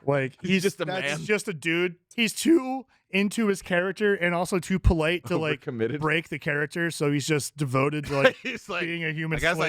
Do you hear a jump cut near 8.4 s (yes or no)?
no